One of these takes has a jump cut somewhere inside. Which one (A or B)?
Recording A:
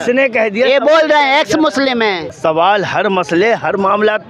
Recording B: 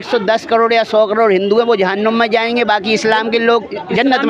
A